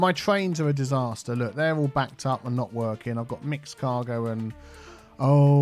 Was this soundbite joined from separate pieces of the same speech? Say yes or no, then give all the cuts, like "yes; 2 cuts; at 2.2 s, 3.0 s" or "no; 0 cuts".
no; 0 cuts